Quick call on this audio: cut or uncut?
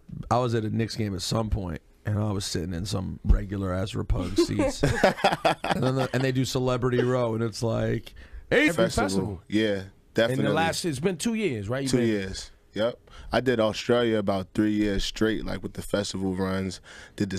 uncut